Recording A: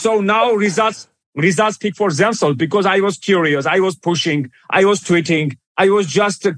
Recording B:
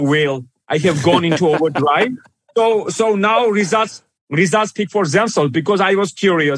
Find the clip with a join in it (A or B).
A